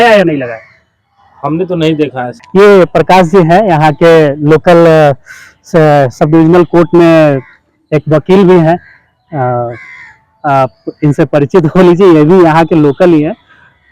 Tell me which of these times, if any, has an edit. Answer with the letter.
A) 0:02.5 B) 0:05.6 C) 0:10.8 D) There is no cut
A